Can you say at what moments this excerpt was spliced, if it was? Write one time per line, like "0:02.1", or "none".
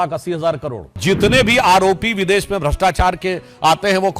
0:01.0